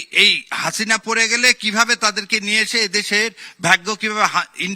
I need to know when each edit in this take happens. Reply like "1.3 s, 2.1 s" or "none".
none